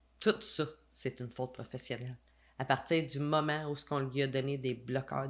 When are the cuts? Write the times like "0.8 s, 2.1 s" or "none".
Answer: none